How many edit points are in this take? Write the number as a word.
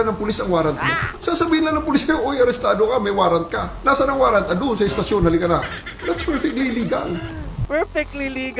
two